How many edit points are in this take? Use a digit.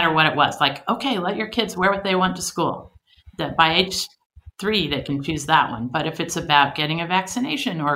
0